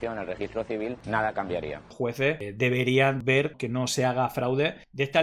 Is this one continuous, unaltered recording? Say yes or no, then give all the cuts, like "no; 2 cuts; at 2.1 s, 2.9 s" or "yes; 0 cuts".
no; 3 cuts; at 1.0 s, 1.9 s, 3.2 s